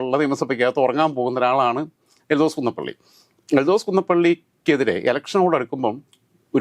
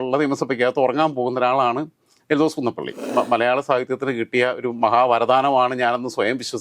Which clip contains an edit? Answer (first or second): second